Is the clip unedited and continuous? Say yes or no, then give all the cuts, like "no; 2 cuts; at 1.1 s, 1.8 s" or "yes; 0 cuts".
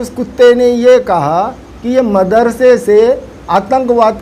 yes; 0 cuts